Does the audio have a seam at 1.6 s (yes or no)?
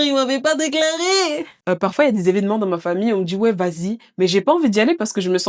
yes